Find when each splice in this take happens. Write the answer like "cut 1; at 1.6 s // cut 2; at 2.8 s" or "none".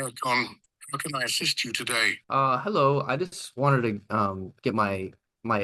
cut 1; at 2.2 s